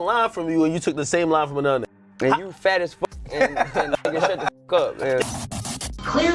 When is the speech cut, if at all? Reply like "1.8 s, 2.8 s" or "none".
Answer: 2.0 s, 5.4 s